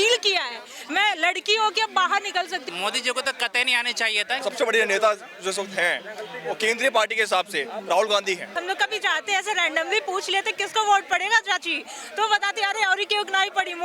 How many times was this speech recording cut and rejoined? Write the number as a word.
three